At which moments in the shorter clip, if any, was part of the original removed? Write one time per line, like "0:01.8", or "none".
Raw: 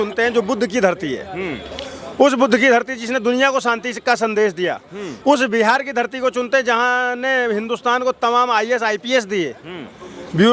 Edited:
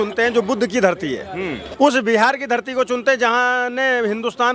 0:01.6